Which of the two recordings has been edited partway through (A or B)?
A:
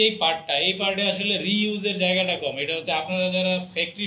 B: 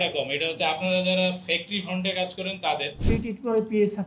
B